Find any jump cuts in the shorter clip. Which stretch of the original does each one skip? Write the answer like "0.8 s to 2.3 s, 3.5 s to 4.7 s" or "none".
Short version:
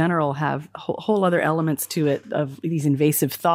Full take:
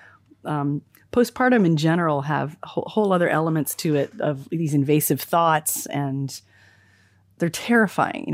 none